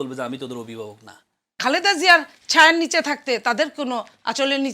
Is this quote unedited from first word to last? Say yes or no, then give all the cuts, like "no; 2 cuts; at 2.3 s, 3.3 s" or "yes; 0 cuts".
no; 1 cut; at 1.6 s